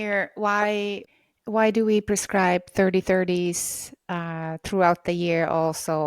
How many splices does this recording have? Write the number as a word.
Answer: one